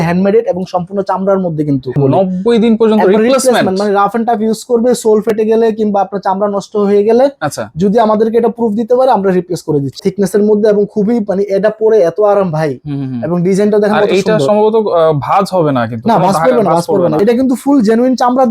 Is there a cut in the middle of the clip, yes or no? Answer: yes